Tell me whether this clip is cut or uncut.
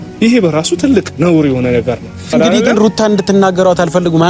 cut